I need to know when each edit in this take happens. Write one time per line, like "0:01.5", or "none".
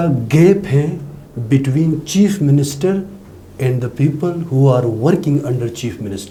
none